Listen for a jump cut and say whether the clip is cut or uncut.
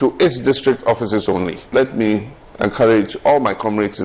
cut